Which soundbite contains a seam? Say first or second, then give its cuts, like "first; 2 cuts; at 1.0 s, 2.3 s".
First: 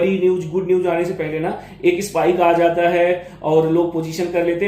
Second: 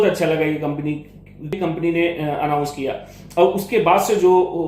second; 1 cut; at 1.6 s